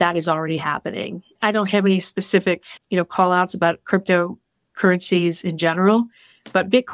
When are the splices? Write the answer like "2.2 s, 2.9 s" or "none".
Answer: 1.4 s